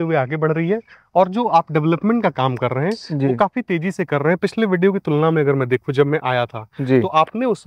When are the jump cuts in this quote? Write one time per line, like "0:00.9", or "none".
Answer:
none